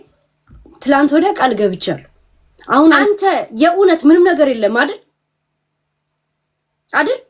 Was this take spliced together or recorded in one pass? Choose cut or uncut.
cut